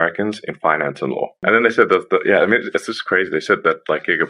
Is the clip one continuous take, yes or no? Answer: no